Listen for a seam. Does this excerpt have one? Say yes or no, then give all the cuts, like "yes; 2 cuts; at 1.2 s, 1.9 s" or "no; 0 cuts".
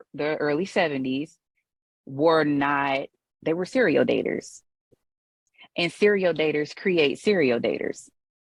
no; 0 cuts